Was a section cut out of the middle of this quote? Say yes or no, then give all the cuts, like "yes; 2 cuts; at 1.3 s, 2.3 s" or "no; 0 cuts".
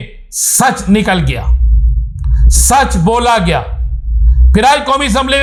no; 0 cuts